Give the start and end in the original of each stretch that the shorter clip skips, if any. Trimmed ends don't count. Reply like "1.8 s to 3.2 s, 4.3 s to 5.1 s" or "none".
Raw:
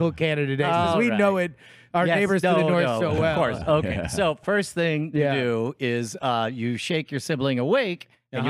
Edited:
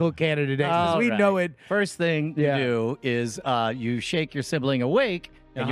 1.6 s to 4.4 s